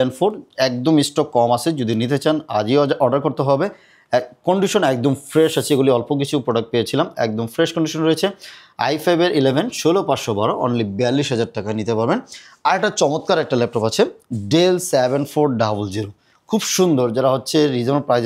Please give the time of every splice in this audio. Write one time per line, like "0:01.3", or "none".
none